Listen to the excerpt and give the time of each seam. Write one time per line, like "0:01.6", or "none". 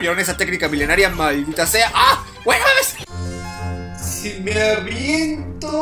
0:03.0